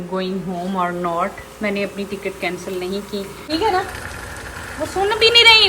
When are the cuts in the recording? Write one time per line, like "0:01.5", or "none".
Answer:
0:03.4